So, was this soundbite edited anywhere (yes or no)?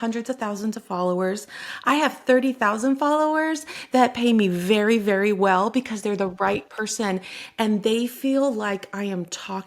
no